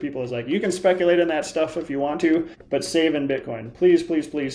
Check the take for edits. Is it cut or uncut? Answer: cut